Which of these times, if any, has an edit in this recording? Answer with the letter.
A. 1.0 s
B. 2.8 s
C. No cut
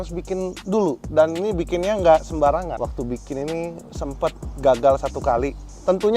B